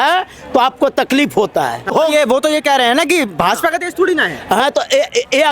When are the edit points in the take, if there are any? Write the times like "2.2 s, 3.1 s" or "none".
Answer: 1.9 s